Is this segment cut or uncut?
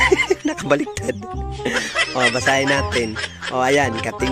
uncut